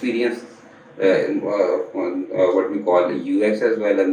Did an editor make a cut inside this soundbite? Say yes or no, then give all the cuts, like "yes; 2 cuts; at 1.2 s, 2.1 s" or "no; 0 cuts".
no; 0 cuts